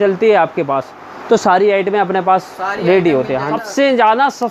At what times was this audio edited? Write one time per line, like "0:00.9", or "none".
0:03.5